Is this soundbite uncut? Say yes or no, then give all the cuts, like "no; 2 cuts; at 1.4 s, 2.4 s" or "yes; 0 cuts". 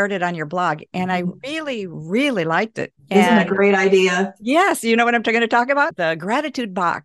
no; 1 cut; at 5.9 s